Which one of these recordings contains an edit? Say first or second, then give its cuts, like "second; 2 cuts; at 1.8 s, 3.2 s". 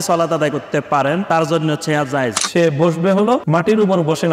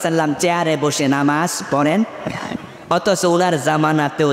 first; 3 cuts; at 1.2 s, 2.4 s, 3.4 s